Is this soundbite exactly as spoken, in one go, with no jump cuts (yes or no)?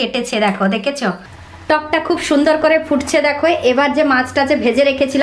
no